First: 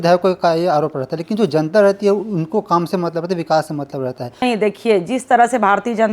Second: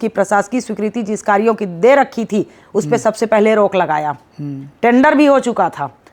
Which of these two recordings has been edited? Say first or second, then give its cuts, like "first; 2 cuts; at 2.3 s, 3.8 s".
first; 1 cut; at 4.4 s